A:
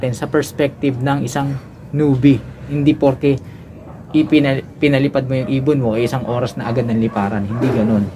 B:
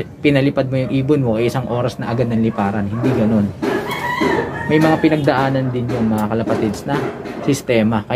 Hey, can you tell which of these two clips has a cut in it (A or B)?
A